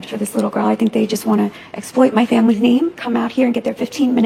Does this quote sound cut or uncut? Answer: uncut